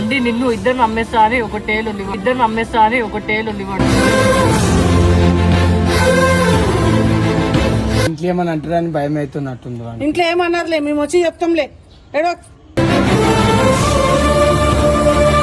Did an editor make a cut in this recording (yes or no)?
yes